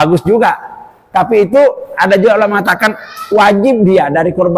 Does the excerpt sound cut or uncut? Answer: uncut